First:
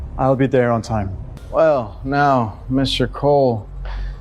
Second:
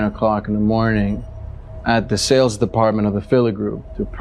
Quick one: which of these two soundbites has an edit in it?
first; 1 cut; at 1.3 s

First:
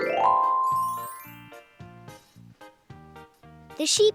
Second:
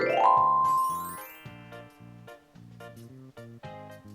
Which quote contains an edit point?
second; 1 cut; at 1.2 s

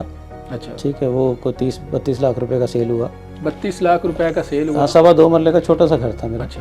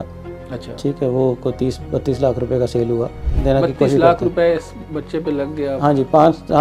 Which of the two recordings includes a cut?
second; 1 cut; at 3.3 s

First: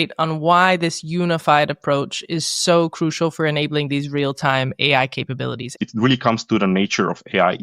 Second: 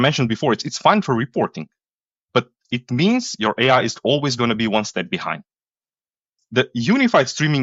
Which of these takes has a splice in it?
first; 1 cut; at 5.6 s

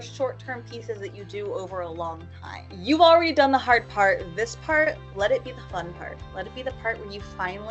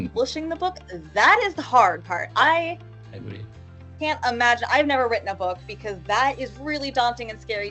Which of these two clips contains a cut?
first; 1 cut; at 2.7 s

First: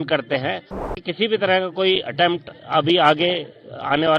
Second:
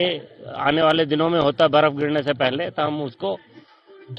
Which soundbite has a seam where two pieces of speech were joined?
first; 1 cut; at 1.0 s

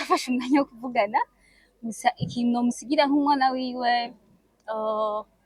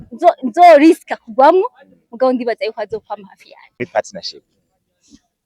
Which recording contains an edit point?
second; 1 cut; at 3.7 s

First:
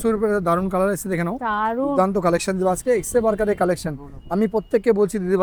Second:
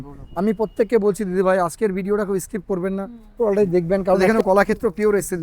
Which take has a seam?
second; 1 cut; at 4.2 s

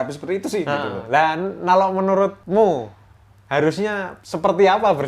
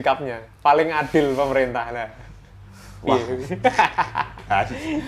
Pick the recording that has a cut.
first; 2 cuts; at 2.4 s, 4.2 s

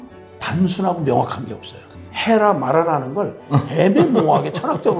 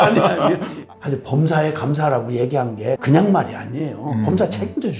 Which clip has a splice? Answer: second; 2 cuts; at 0.8 s, 3.0 s

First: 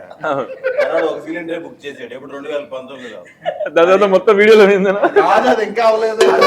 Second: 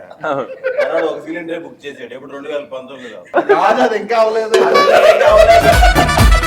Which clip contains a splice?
second; 1 cut; at 3.3 s

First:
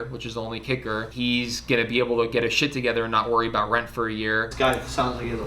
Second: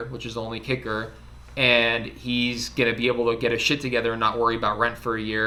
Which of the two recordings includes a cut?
first; 2 cuts; at 1.1 s, 4.5 s

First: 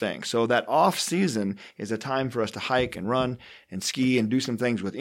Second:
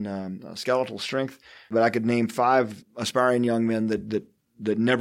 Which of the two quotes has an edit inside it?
second; 2 cuts; at 1.7 s, 2.8 s

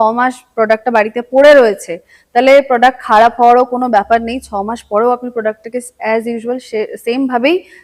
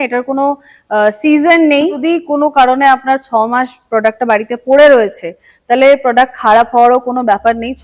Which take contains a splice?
second; 1 cut; at 2.0 s

